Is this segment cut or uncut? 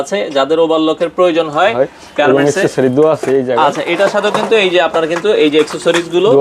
uncut